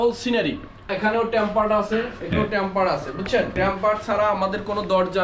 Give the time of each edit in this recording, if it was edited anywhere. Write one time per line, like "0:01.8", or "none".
0:00.8
0:02.3
0:03.5